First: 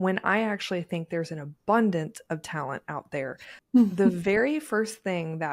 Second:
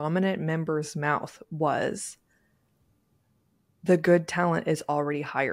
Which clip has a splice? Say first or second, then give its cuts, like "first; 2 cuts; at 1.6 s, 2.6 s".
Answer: first; 1 cut; at 3.5 s